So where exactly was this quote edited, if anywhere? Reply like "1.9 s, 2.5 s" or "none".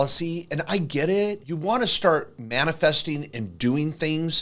1.5 s